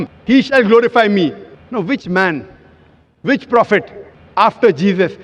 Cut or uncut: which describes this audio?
cut